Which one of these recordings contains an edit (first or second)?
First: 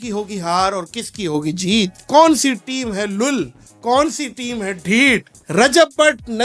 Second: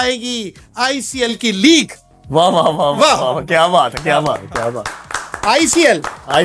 first